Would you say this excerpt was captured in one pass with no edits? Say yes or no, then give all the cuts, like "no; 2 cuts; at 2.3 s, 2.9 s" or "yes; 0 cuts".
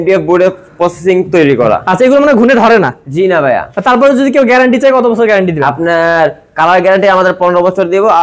yes; 0 cuts